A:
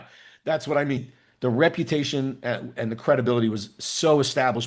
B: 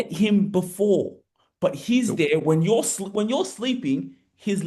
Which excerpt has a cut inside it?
A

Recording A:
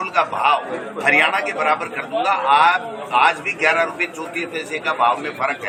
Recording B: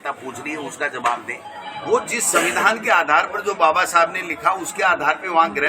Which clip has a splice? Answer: B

